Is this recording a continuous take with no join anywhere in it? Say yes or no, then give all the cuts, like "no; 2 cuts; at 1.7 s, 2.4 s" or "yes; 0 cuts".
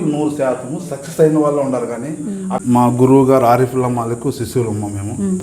no; 1 cut; at 2.5 s